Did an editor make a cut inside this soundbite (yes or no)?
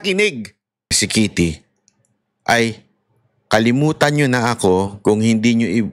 yes